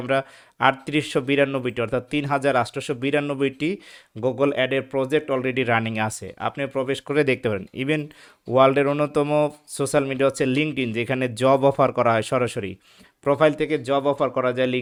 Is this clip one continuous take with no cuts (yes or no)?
yes